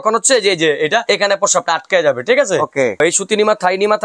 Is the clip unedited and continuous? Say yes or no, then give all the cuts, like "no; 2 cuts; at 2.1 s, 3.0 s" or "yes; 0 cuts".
no; 2 cuts; at 1.0 s, 3.0 s